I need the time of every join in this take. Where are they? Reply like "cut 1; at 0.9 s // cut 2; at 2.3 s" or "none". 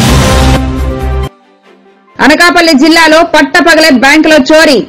cut 1; at 0.9 s